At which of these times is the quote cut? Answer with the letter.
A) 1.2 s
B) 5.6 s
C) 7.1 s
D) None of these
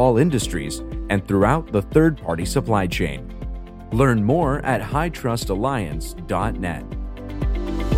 C